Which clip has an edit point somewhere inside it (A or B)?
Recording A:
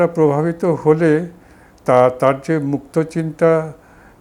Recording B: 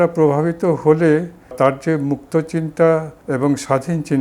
B